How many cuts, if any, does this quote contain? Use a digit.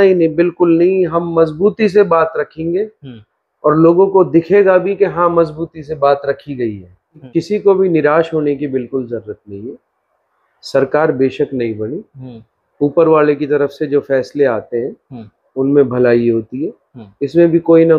1